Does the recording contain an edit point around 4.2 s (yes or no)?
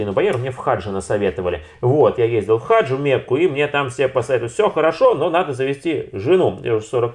no